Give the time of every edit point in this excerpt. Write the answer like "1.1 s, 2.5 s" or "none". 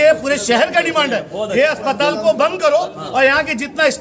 none